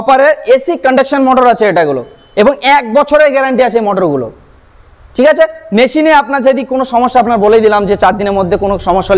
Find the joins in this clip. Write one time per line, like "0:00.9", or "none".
none